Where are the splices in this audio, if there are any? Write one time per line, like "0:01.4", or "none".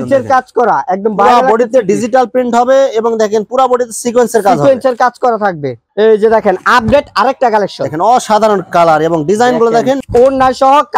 0:05.8
0:10.0